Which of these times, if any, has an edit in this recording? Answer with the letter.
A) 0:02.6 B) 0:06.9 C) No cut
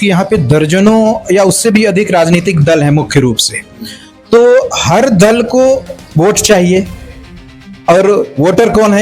C